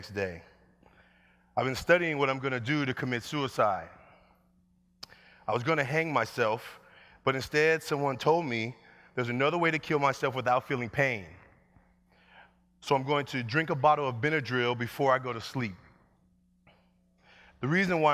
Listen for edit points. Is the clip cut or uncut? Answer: cut